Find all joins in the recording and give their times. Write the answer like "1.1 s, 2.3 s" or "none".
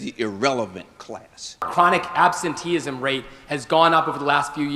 1.7 s